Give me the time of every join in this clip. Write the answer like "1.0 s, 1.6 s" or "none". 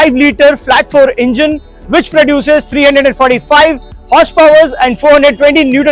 none